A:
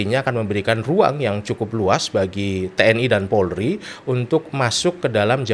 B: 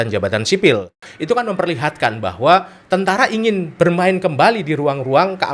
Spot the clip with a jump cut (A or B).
B